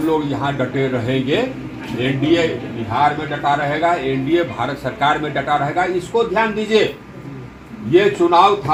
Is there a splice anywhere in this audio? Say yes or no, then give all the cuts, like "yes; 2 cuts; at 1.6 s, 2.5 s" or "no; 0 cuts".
no; 0 cuts